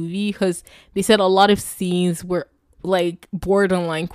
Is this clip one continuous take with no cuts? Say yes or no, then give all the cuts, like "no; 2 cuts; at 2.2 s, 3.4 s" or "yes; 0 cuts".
yes; 0 cuts